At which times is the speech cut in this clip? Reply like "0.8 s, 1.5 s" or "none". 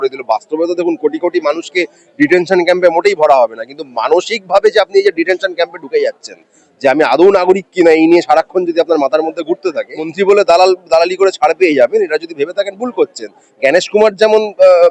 10.1 s